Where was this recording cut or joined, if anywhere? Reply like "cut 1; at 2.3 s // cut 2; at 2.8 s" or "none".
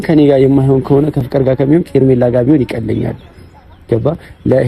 cut 1; at 1.3 s